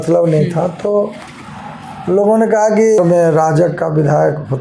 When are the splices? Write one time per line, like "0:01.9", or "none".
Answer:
0:03.0